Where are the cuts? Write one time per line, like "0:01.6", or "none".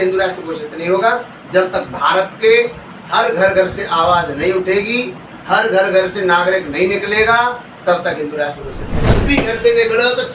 0:09.2